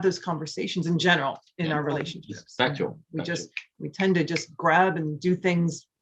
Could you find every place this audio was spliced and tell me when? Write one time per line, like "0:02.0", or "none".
none